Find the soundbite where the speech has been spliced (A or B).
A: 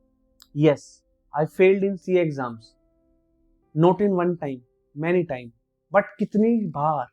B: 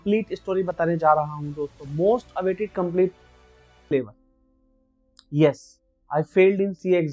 B